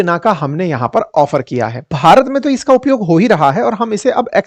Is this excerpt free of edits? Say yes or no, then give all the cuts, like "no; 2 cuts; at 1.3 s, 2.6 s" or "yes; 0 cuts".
no; 1 cut; at 1.9 s